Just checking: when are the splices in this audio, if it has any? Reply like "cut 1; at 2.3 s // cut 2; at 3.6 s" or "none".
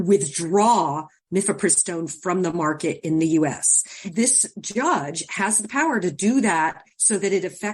cut 1; at 4.0 s